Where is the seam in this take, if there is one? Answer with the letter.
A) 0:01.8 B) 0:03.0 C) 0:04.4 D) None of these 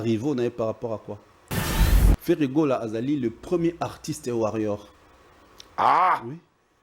A